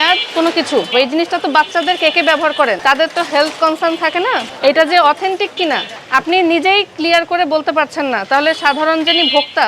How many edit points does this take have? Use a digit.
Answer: 4